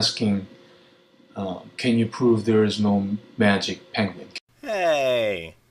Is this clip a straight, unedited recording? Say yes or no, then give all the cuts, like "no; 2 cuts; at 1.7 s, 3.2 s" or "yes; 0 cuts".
no; 1 cut; at 3.0 s